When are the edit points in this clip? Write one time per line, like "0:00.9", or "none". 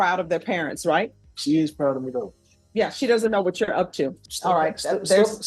0:01.2
0:04.2

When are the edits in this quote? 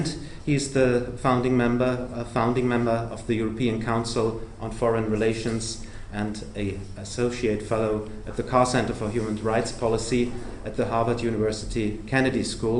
0:01.3

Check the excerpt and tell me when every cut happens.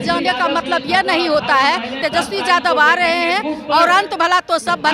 0:02.0

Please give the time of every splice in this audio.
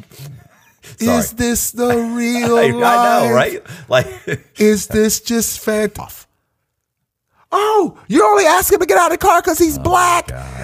0:06.1

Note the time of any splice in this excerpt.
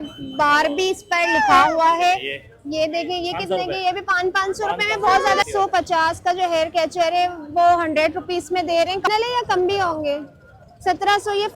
0:05.5
0:09.1

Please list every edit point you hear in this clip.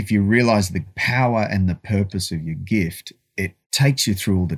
0:01.0
0:03.6

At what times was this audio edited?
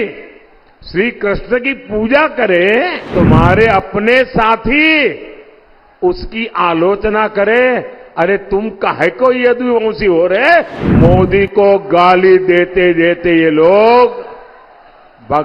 0:03.1
0:10.8

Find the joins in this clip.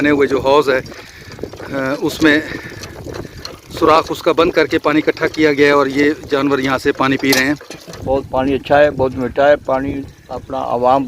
0:08.0

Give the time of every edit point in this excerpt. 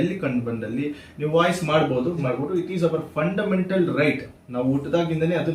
0:02.2

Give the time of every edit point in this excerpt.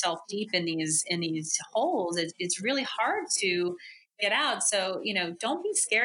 none

